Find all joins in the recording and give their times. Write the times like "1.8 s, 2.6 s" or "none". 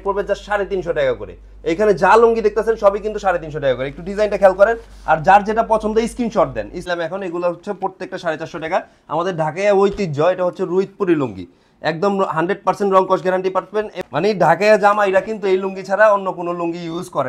6.9 s, 13.9 s